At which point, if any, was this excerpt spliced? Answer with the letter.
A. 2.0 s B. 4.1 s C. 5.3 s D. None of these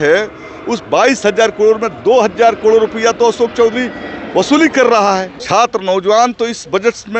C